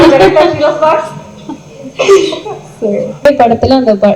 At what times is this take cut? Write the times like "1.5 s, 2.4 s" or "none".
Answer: 3.2 s